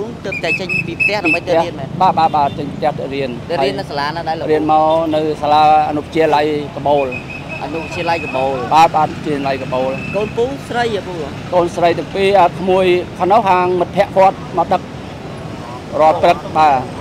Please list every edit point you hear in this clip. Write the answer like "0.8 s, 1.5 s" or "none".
none